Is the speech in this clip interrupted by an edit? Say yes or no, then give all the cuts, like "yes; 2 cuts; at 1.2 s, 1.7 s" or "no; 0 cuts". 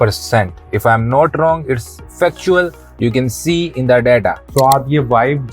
yes; 1 cut; at 4.4 s